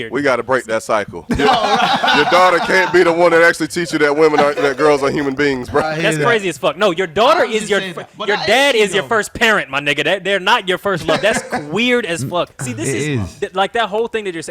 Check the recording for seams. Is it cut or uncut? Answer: cut